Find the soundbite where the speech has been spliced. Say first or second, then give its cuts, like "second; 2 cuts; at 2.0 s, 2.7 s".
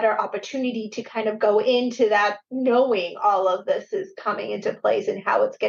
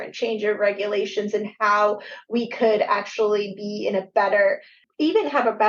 second; 1 cut; at 4.8 s